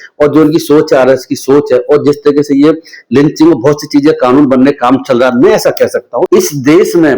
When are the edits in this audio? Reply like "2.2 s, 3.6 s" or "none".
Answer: 6.3 s